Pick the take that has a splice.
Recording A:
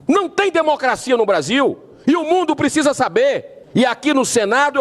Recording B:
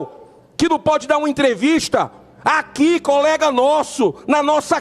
A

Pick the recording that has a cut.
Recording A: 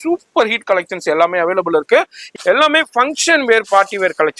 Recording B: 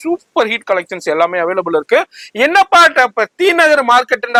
A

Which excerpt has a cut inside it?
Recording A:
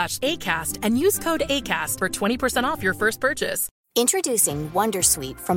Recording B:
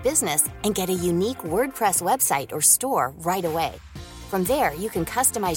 A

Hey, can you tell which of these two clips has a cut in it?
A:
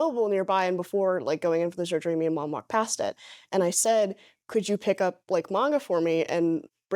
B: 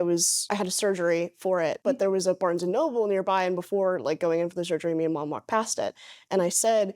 B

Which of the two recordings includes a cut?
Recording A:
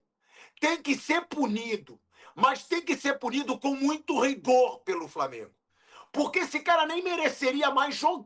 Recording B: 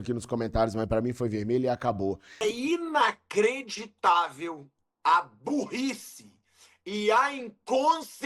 B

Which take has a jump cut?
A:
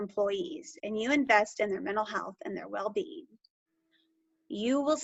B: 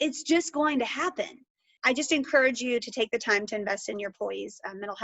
B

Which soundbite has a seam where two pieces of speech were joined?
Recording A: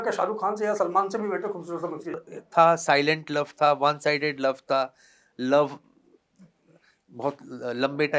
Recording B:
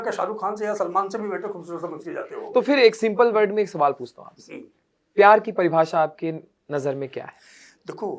A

